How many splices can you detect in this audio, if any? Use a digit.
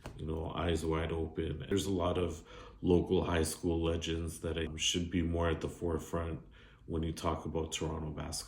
2